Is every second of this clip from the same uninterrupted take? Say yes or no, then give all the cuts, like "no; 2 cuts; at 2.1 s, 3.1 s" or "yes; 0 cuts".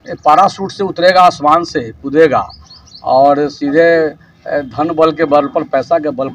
yes; 0 cuts